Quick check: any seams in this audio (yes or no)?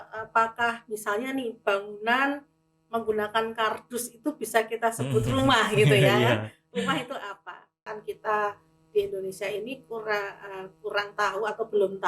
yes